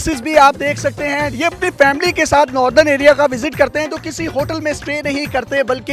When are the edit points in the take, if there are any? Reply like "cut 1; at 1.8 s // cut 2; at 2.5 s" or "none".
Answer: cut 1; at 1.3 s